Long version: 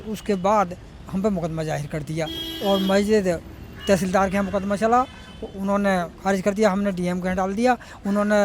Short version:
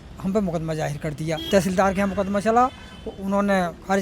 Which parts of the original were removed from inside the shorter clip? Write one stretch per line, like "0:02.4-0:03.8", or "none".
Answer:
0:02.3-0:03.8